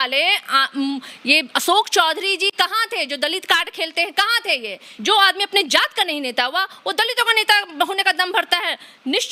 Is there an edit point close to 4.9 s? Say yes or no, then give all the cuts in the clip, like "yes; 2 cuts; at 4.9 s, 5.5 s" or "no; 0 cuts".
yes; 1 cut; at 4.9 s